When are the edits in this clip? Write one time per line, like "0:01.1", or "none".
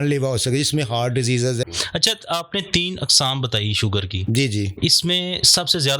0:01.6